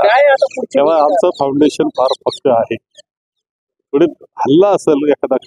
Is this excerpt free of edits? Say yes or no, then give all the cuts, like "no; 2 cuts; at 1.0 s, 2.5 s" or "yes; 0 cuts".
yes; 0 cuts